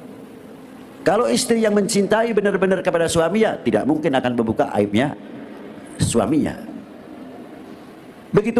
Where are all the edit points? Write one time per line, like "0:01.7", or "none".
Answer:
none